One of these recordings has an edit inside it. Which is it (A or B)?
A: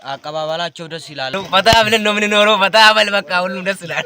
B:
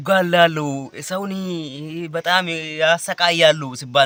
A